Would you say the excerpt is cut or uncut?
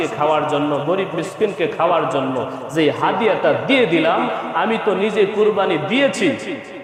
uncut